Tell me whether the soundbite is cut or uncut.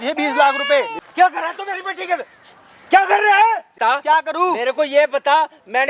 cut